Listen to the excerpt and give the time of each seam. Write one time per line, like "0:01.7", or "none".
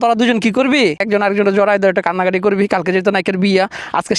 0:01.0